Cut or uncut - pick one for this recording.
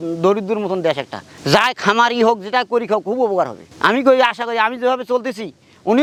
uncut